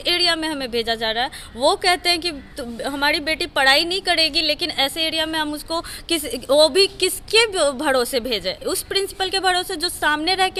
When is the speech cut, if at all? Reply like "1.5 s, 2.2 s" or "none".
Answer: none